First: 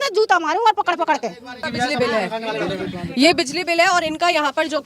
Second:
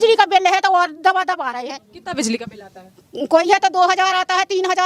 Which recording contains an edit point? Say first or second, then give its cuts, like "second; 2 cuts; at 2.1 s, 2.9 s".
first; 1 cut; at 1.6 s